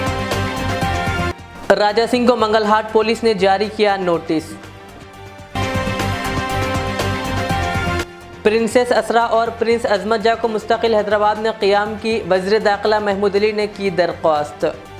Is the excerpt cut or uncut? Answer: uncut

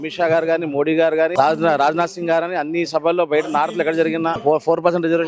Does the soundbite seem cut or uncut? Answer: cut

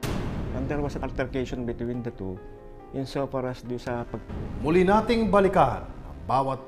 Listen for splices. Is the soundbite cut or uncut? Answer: uncut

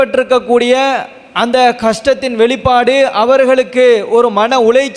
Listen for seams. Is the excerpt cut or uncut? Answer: uncut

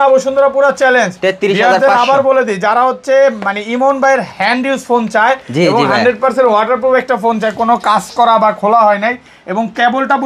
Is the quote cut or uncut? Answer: uncut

